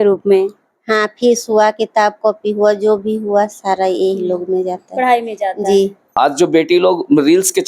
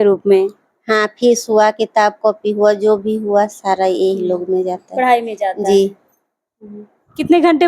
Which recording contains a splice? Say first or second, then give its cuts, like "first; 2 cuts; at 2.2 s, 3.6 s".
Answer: first; 1 cut; at 6.0 s